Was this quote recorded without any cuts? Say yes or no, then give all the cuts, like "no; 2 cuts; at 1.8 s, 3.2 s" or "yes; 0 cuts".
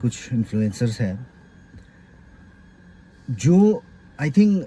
yes; 0 cuts